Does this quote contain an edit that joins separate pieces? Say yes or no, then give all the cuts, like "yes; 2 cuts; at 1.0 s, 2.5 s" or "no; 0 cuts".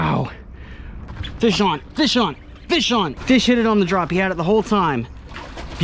yes; 2 cuts; at 1.3 s, 3.2 s